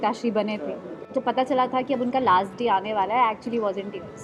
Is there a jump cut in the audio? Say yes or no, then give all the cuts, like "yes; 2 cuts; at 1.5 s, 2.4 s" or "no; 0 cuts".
yes; 1 cut; at 1.0 s